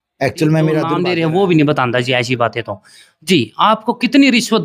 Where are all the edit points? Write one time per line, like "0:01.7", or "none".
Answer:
0:01.0